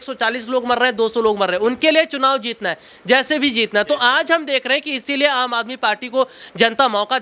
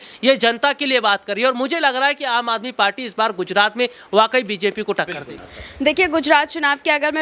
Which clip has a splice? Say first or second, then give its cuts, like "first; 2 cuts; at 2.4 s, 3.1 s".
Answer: second; 1 cut; at 5.3 s